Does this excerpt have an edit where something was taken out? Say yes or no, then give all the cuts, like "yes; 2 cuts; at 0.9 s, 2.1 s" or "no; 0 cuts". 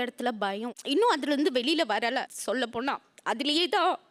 no; 0 cuts